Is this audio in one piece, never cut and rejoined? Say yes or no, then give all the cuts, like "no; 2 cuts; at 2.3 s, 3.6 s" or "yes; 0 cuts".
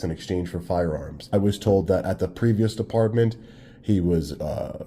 no; 1 cut; at 1.3 s